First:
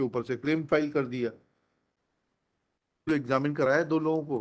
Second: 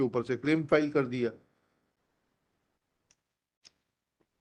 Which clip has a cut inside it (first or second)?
first